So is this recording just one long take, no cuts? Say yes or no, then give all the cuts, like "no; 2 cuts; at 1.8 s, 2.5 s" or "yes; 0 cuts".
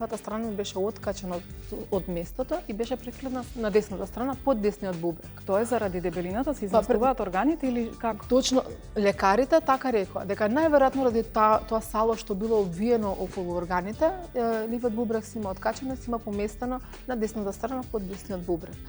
yes; 0 cuts